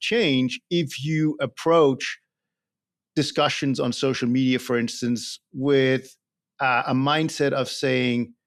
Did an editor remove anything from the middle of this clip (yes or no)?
no